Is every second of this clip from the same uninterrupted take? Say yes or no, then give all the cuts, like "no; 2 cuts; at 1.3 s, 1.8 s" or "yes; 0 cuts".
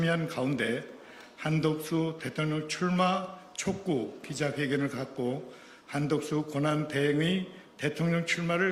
yes; 0 cuts